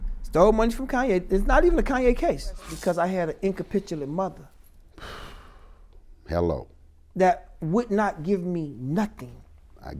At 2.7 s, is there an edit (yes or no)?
yes